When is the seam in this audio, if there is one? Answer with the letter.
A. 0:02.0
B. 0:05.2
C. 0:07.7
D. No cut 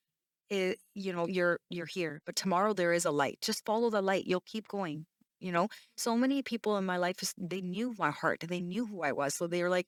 D